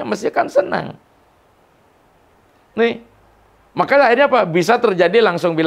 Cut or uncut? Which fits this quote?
uncut